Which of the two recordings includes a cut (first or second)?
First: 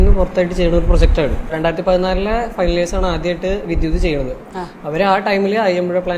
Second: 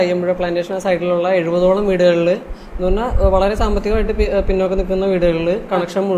first